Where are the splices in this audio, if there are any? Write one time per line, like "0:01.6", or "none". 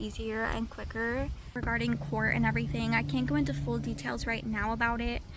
0:01.5